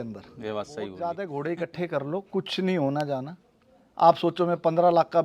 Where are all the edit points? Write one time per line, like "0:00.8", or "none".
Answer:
0:01.0